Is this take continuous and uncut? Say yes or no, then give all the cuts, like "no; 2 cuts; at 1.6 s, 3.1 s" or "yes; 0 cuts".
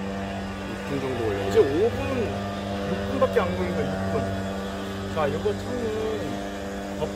yes; 0 cuts